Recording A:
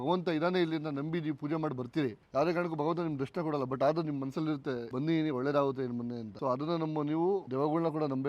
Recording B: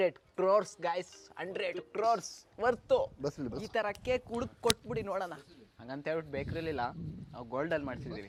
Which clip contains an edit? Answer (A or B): A